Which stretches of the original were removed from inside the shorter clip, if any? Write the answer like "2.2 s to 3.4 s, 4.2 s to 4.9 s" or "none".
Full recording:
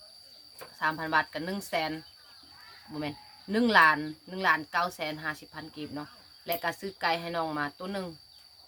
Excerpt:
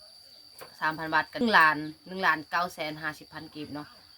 1.4 s to 3.6 s